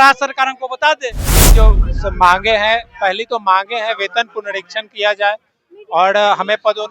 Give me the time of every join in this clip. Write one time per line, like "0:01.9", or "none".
0:01.5